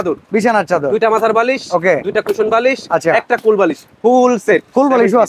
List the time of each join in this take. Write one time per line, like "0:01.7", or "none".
none